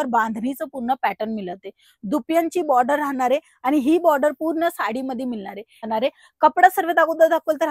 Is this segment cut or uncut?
cut